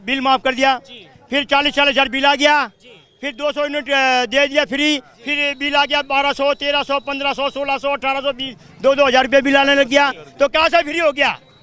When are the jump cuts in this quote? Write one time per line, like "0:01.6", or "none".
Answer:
none